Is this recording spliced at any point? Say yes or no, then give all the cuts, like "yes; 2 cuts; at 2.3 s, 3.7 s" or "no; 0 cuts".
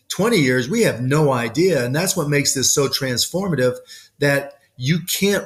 no; 0 cuts